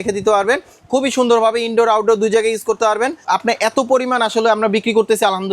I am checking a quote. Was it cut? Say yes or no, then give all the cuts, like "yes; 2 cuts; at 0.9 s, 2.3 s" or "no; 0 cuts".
yes; 1 cut; at 3.2 s